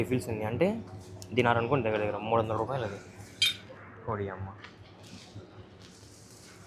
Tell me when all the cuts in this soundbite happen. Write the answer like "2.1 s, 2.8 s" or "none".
none